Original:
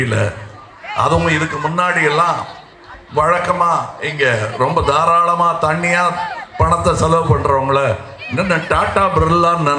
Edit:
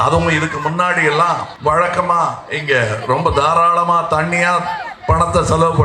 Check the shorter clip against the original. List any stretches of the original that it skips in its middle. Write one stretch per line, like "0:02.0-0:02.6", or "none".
0:02.5-0:03.0